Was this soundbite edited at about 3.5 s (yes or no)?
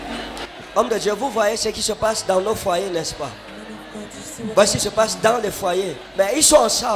no